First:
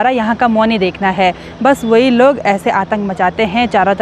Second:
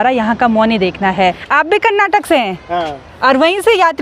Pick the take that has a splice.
second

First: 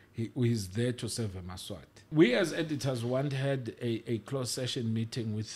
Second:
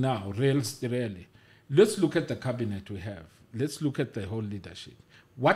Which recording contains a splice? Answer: first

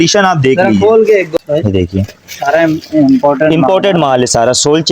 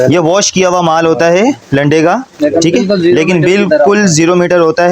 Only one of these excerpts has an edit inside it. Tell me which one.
first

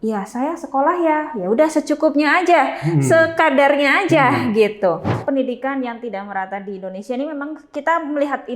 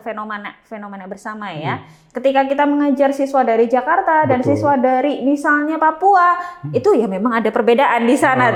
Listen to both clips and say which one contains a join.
first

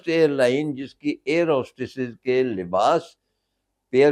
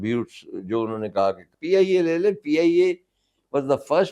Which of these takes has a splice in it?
second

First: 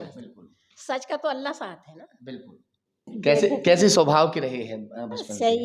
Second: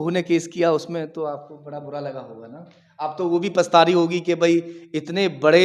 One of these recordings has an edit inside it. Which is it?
first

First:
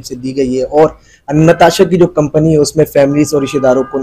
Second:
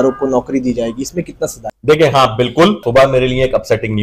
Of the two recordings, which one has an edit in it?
second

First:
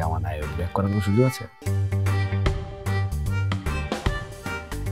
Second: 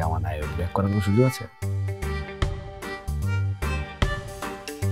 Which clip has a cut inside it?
first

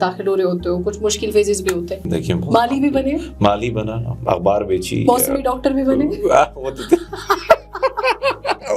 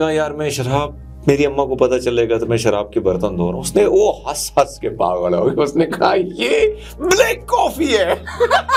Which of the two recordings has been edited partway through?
first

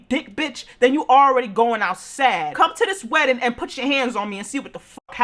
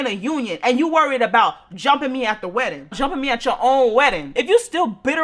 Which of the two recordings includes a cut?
second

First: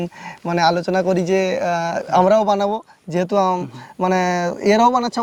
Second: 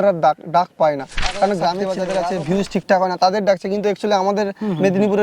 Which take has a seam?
second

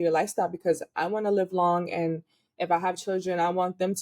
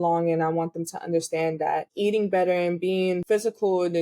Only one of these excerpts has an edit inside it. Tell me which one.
second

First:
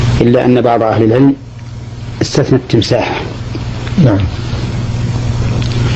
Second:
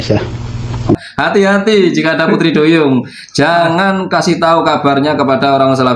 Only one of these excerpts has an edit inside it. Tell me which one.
second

